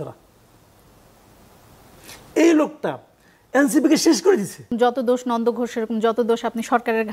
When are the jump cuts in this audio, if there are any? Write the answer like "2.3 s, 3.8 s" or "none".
4.7 s